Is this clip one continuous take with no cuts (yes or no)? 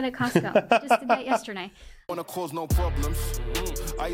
no